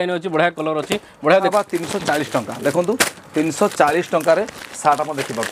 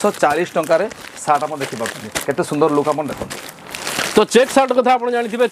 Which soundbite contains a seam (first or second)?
first